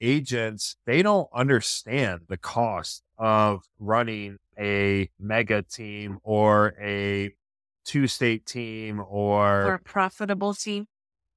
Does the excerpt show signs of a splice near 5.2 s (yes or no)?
yes